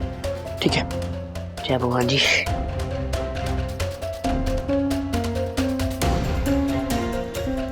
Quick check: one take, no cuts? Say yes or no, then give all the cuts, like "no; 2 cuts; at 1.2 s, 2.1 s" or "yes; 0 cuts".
yes; 0 cuts